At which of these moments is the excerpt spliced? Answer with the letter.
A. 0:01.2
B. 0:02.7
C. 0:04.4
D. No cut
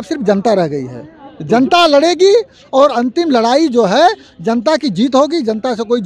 D